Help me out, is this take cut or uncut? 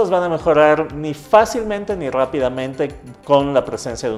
uncut